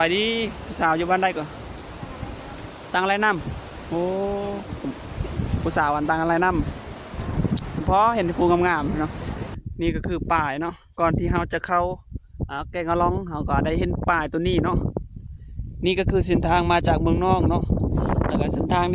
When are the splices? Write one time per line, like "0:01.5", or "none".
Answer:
0:09.5